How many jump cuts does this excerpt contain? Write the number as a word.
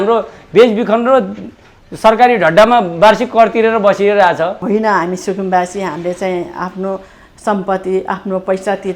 one